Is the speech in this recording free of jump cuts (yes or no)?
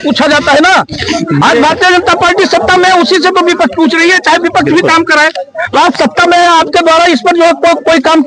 yes